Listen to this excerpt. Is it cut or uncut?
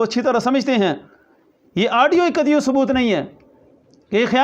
uncut